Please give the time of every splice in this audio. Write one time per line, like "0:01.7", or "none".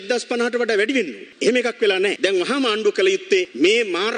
0:02.1